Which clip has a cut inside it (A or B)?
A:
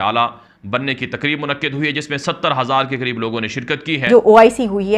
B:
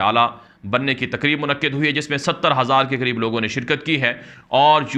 A